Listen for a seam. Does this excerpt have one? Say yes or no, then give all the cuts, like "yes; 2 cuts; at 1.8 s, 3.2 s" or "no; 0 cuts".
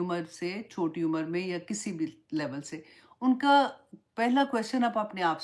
no; 0 cuts